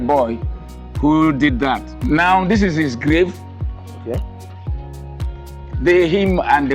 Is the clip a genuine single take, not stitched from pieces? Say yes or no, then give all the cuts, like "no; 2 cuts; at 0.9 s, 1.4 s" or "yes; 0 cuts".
no; 1 cut; at 1.9 s